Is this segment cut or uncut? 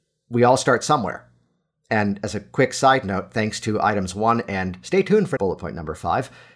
cut